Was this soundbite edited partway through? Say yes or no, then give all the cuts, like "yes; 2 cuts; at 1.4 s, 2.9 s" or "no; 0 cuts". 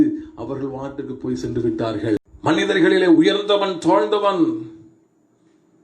yes; 1 cut; at 2.2 s